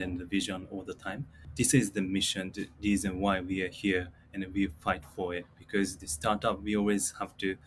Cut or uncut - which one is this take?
cut